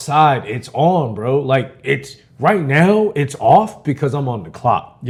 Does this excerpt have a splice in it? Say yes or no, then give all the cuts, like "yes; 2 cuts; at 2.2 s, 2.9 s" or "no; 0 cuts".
no; 0 cuts